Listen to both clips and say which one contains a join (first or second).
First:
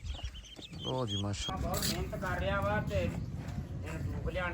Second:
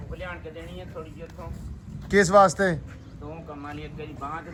first